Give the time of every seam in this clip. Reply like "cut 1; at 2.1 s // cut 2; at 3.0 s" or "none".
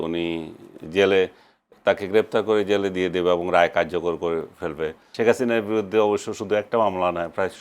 cut 1; at 5.0 s